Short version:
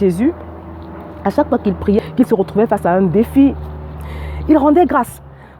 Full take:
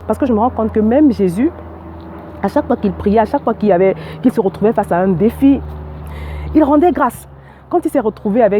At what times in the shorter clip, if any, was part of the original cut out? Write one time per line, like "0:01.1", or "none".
0:02.0